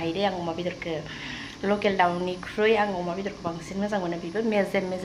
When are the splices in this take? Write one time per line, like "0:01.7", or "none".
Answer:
none